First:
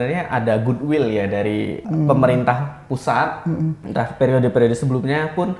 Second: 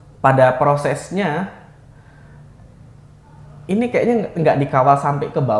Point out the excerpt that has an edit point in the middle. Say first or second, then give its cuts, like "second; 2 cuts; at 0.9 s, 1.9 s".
first; 2 cuts; at 1.8 s, 3.8 s